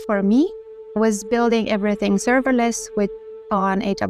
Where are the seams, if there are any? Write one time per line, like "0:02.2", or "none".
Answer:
none